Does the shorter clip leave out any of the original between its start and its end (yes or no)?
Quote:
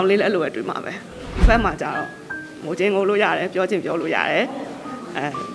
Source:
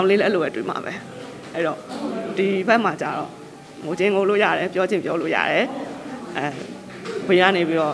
yes